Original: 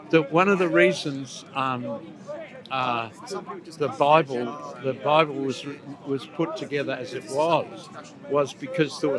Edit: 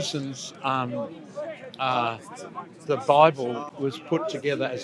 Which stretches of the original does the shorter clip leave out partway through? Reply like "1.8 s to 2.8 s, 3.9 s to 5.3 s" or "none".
4.6 s to 5.9 s

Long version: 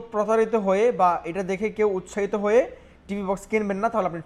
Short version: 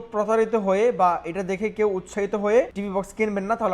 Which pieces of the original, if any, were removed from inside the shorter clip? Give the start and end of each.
2.8 s to 3.1 s

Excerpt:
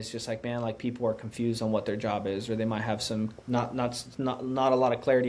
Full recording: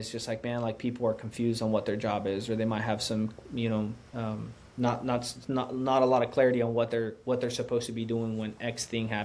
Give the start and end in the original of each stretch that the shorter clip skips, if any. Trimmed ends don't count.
3.4 s to 4.7 s

